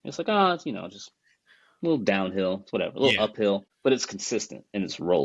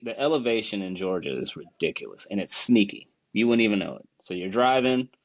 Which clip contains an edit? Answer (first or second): first